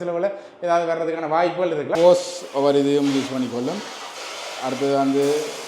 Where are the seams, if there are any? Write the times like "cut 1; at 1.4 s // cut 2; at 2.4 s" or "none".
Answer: cut 1; at 1.9 s